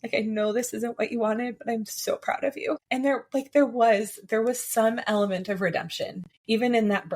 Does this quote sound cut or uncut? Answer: cut